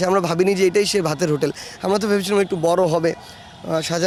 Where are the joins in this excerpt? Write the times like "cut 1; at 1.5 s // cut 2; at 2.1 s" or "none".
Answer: none